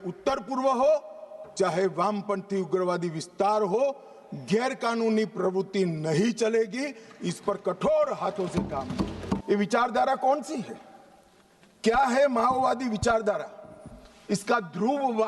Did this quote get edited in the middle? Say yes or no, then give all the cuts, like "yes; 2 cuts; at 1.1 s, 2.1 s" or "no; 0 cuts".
yes; 1 cut; at 9.4 s